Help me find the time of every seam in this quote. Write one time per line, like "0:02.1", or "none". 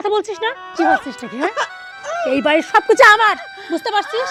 none